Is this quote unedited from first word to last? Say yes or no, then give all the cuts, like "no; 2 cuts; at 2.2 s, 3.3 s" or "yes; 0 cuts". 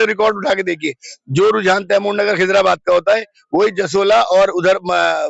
yes; 0 cuts